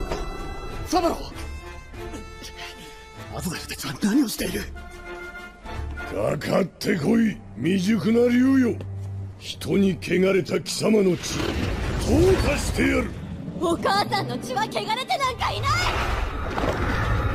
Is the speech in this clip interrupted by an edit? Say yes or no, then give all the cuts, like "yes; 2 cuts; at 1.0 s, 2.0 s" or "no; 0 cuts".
no; 0 cuts